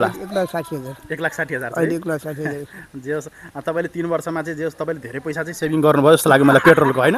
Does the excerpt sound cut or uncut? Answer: uncut